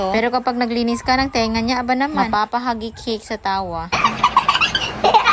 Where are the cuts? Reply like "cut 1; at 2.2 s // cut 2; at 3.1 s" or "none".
none